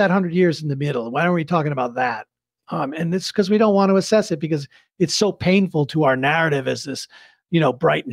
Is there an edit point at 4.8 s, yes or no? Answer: no